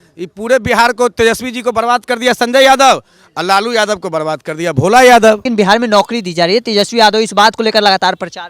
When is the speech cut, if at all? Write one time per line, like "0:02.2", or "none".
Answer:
0:05.5